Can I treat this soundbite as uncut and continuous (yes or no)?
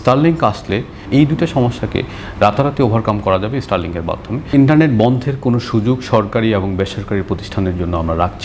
no